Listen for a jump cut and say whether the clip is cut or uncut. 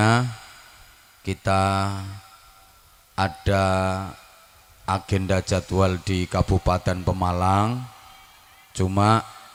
uncut